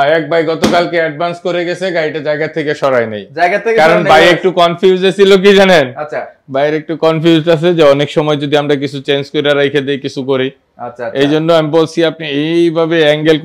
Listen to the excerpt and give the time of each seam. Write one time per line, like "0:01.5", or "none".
none